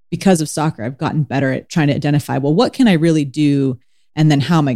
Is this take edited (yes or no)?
no